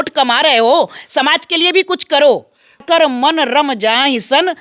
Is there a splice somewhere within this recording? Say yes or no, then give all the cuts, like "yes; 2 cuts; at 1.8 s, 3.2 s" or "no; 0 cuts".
yes; 1 cut; at 2.8 s